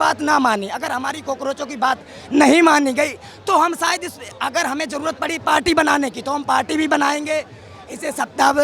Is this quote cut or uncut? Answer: uncut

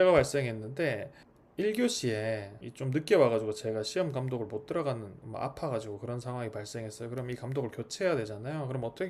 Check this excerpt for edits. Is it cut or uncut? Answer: uncut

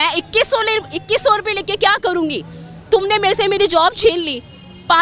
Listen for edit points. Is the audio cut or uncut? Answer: uncut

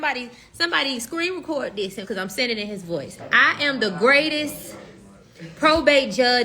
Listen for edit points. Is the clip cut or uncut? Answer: cut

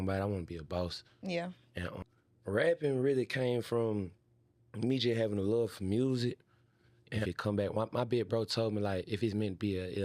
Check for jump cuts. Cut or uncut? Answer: cut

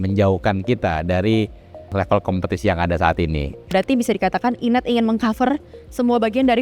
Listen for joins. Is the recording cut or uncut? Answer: cut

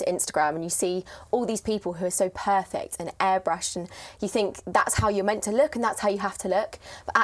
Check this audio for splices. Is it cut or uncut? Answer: uncut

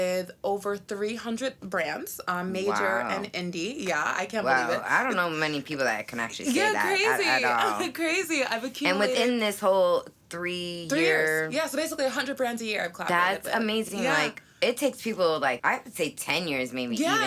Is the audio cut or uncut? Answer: uncut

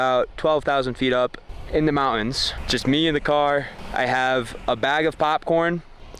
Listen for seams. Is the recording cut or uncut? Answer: cut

